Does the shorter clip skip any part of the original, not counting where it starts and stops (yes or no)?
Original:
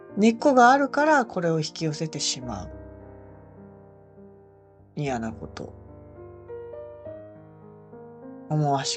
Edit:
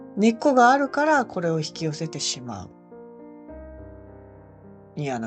no